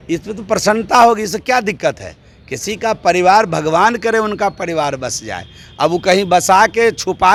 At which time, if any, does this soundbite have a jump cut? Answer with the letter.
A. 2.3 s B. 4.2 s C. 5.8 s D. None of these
D